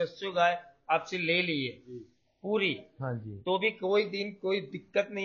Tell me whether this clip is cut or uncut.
uncut